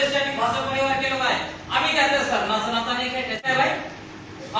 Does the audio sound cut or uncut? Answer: cut